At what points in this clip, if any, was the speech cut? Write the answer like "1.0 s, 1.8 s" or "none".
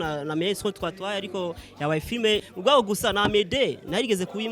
2.5 s